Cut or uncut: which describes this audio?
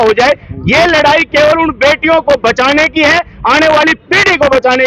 uncut